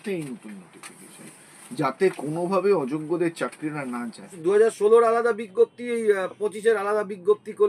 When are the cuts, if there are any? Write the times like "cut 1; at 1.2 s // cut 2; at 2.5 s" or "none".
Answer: cut 1; at 4.3 s

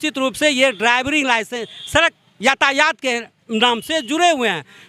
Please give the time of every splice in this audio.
none

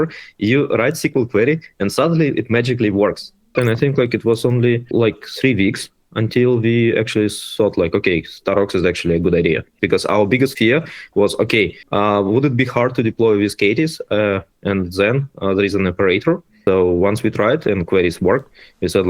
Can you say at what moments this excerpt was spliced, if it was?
cut 1; at 3.5 s // cut 2; at 4.9 s // cut 3; at 9.7 s // cut 4; at 10.5 s // cut 5; at 11.8 s // cut 6; at 16.5 s

